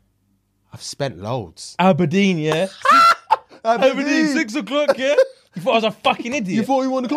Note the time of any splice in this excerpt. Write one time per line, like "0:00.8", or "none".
none